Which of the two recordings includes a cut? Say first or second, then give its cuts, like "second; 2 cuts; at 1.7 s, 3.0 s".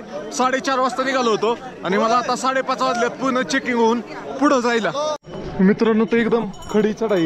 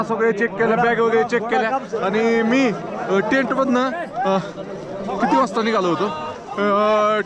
first; 1 cut; at 5.3 s